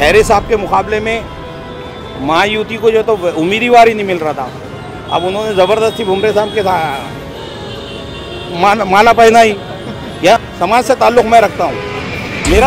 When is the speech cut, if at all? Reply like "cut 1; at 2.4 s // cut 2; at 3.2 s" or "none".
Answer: cut 1; at 10.5 s